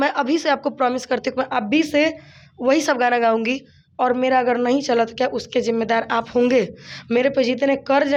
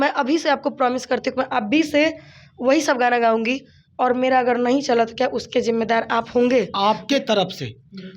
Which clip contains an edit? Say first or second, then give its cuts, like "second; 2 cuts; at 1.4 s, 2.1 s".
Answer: second; 1 cut; at 6.7 s